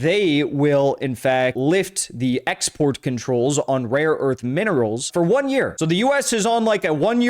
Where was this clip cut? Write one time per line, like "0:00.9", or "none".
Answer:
0:01.6
0:05.1
0:05.7